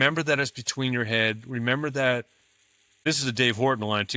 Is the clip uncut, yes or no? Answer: no